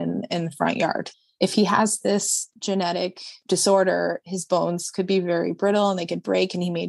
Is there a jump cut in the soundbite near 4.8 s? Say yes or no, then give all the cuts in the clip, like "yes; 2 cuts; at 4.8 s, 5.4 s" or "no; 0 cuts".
no; 1 cut; at 3.4 s